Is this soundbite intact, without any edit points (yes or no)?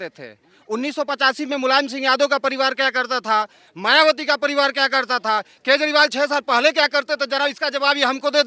yes